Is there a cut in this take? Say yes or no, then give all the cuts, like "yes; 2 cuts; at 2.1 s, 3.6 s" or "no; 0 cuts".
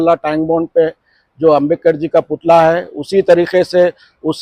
no; 0 cuts